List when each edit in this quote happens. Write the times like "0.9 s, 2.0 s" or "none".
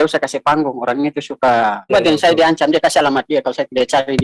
1.9 s